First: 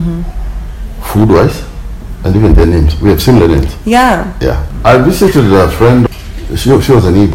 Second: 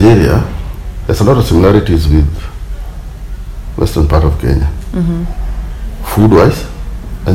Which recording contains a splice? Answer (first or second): first